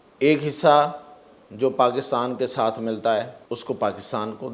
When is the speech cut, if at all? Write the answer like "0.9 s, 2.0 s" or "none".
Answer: 3.4 s